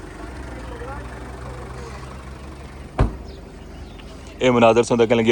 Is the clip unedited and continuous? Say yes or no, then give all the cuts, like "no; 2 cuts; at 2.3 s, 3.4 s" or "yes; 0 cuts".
yes; 0 cuts